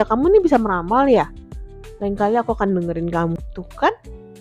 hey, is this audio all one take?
no; 1 cut; at 3.4 s

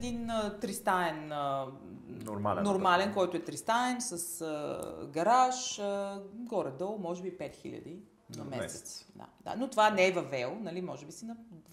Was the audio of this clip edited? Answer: no; 0 cuts

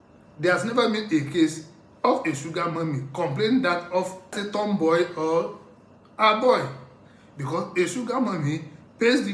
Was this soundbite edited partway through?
yes; 1 cut; at 4.4 s

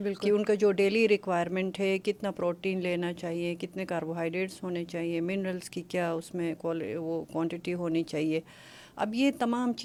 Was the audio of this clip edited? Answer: no; 0 cuts

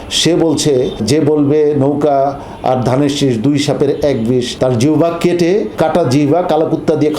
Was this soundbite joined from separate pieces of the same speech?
yes; 3 cuts; at 1.0 s, 4.5 s, 5.7 s

